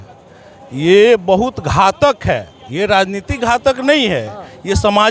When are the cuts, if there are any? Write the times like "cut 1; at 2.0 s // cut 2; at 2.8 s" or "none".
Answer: none